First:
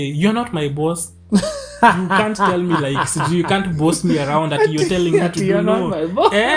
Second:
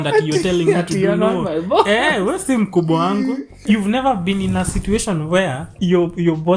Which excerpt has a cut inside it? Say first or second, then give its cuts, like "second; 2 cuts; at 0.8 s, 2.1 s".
second; 2 cuts; at 3.6 s, 5.7 s